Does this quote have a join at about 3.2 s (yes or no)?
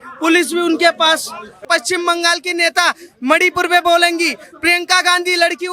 no